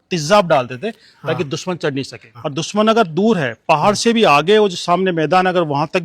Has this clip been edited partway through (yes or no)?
yes